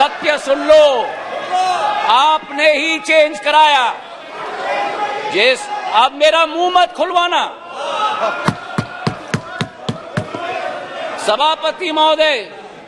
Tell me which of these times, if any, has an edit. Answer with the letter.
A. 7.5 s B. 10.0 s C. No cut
C